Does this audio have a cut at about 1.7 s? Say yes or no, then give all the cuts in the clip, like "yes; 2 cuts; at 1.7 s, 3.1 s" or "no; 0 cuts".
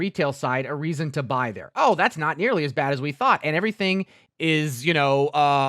no; 1 cut; at 4.2 s